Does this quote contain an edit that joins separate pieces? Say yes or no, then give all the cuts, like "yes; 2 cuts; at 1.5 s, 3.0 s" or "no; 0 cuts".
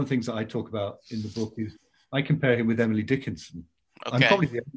no; 0 cuts